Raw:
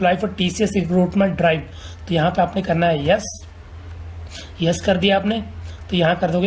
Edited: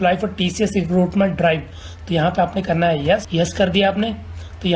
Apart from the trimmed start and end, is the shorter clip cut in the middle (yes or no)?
yes